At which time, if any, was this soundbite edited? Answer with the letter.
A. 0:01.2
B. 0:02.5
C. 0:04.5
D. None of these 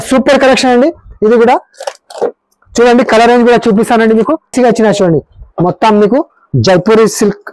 C